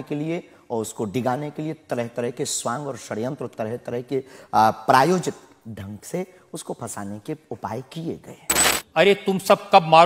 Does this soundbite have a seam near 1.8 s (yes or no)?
no